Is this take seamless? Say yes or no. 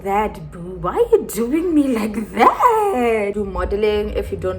no